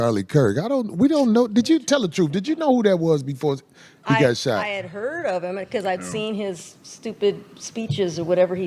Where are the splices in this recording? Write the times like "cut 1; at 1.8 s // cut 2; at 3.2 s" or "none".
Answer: none